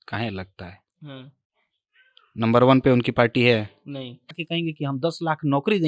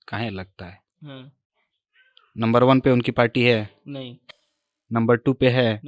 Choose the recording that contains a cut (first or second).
first